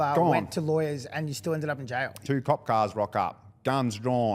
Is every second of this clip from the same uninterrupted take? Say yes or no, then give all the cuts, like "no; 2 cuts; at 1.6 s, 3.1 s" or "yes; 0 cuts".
no; 1 cut; at 2.2 s